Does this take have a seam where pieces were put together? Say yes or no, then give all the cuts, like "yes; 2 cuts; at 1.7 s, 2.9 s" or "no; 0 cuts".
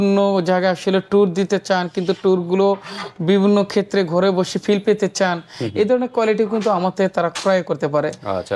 no; 0 cuts